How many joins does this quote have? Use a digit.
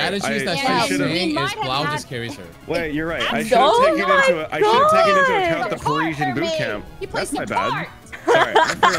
0